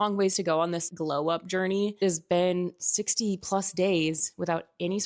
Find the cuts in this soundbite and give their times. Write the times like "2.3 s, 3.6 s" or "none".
2.0 s